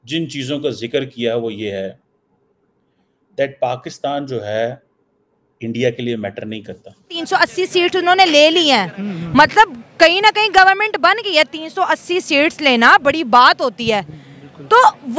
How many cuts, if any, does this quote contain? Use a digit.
1